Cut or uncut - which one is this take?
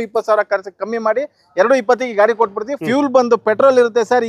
cut